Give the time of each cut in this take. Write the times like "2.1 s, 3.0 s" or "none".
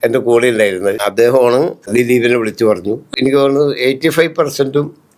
1.0 s, 1.9 s, 3.1 s